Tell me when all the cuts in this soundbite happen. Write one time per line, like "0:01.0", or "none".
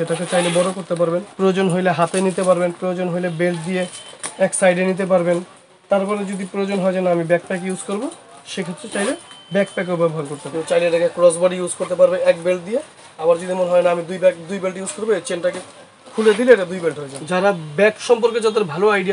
0:01.3
0:10.4
0:17.1